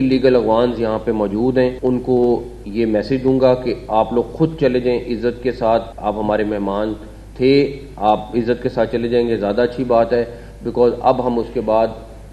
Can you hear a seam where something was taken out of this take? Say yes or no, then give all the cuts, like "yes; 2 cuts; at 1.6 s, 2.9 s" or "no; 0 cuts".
yes; 2 cuts; at 1.8 s, 5.9 s